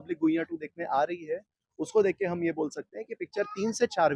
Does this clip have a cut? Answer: no; 0 cuts

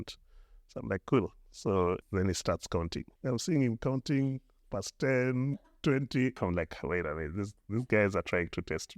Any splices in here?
yes; 3 cuts; at 2.0 s, 3.1 s, 6.4 s

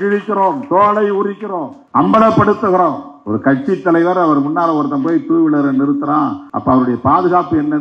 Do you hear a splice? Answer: yes; 3 cuts; at 1.7 s, 3.1 s, 6.5 s

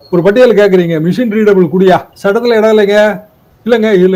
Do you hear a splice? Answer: no; 0 cuts

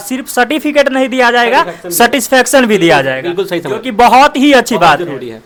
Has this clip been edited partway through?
no; 0 cuts

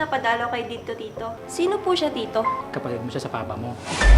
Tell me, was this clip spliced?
yes; 2 cuts; at 1.4 s, 2.6 s

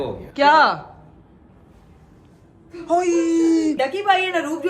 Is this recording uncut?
no; 1 cut; at 3.8 s

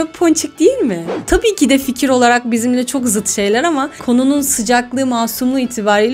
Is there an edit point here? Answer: yes; 2 cuts; at 1.1 s, 4.0 s

